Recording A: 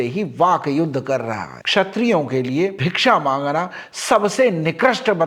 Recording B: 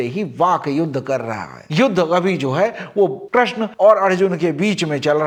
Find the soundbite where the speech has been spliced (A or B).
A